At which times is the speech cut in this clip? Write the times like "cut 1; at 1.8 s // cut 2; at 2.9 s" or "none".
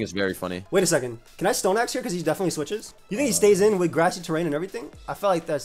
cut 1; at 3.0 s